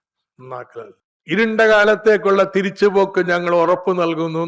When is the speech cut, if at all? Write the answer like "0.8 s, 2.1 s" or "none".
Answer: 1.1 s